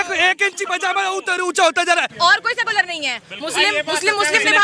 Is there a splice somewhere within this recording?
yes; 1 cut; at 2.1 s

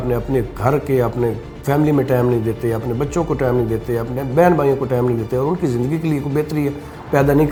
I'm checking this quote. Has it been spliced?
no; 0 cuts

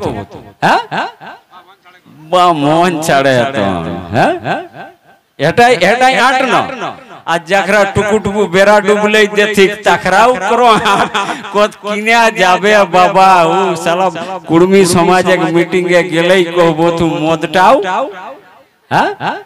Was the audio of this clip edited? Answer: no; 0 cuts

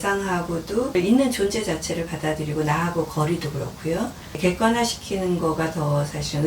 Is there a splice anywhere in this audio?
yes; 2 cuts; at 0.9 s, 4.4 s

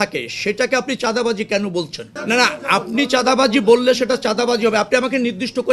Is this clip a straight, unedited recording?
yes; 0 cuts

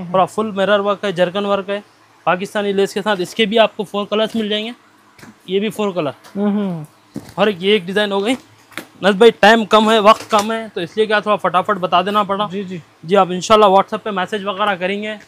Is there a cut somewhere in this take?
no; 0 cuts

